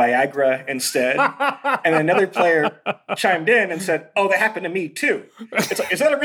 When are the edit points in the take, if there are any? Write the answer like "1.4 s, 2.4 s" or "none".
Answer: 3.1 s